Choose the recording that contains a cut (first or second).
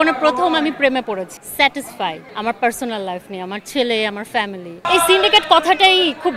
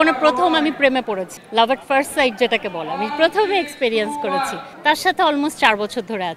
first